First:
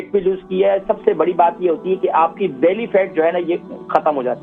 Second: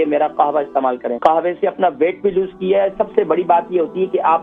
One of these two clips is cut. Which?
second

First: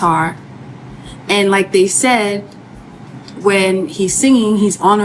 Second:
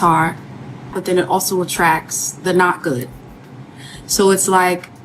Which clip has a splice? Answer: second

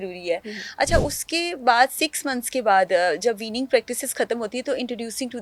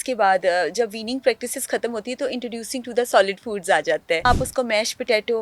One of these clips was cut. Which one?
second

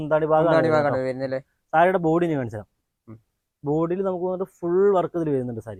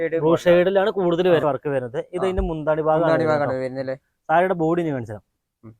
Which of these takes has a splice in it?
second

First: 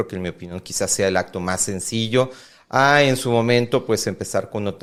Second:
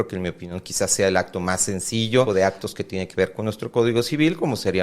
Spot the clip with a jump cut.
second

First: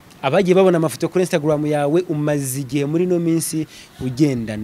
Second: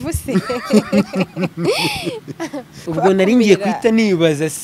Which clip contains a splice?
second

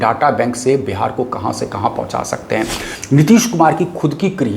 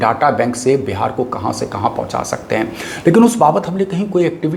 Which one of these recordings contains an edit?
first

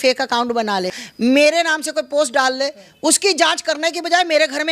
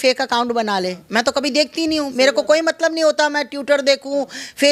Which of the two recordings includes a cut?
first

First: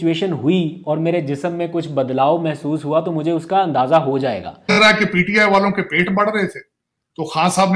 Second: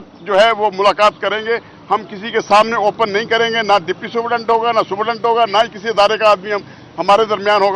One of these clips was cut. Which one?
first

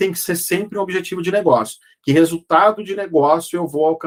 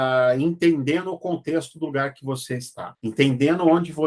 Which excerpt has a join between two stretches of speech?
second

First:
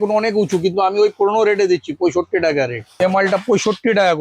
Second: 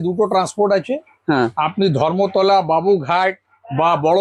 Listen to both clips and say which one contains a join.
first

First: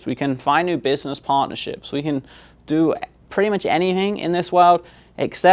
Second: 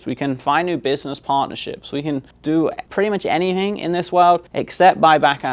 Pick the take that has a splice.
second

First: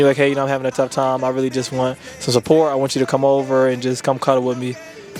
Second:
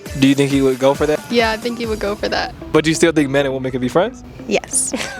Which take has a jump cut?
second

